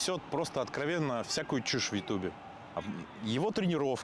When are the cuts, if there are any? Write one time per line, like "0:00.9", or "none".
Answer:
0:02.8